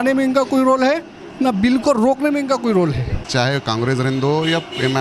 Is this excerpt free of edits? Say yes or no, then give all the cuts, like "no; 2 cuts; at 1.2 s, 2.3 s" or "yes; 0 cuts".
no; 1 cut; at 3.2 s